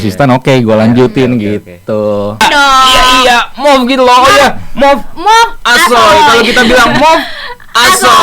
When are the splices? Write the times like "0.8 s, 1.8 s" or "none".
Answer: 2.4 s